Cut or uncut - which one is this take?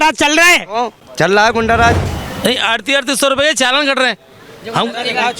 cut